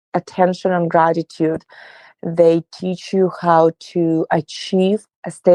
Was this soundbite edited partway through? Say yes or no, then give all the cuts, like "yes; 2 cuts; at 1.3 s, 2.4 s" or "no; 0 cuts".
no; 0 cuts